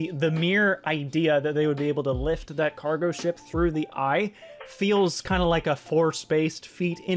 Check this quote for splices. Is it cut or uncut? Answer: uncut